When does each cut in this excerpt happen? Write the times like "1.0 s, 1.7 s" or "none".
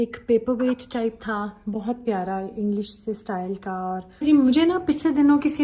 4.2 s